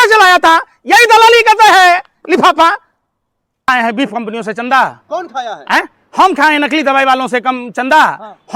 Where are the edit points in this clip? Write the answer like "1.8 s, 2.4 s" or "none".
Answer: 3.7 s